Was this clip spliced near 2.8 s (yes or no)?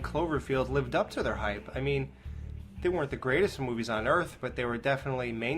no